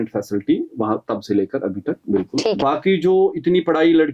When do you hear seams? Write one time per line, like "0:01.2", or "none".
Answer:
0:02.6